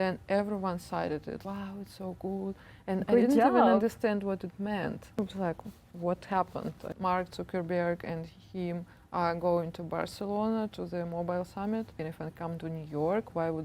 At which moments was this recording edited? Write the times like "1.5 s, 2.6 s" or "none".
1.4 s, 5.2 s, 6.9 s, 12.0 s